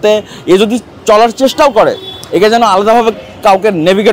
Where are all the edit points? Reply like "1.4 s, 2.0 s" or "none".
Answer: none